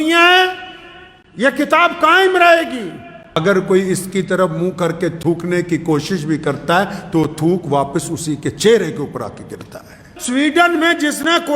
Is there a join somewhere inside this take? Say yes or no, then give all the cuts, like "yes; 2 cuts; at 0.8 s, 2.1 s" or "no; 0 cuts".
yes; 2 cuts; at 3.4 s, 10.1 s